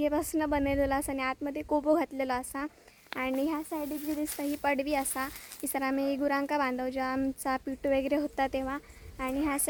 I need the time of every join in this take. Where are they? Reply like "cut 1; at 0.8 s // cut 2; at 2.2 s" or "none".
none